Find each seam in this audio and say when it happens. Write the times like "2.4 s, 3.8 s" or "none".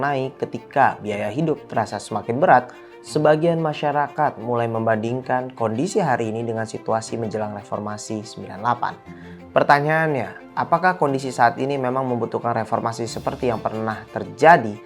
none